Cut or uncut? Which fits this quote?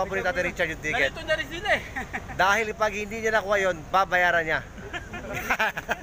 uncut